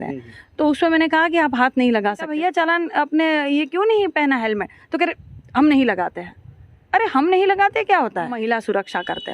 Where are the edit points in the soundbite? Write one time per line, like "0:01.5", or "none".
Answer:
0:02.3
0:08.4